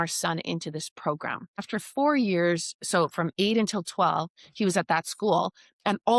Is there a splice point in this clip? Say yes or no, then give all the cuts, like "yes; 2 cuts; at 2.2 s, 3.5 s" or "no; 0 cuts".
yes; 1 cut; at 1.7 s